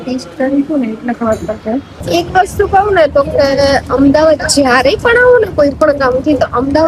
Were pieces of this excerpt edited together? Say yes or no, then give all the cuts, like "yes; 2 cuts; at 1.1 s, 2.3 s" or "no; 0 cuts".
yes; 1 cut; at 1.9 s